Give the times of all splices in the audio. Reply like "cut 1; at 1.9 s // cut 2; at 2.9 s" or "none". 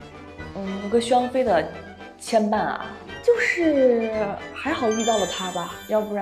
none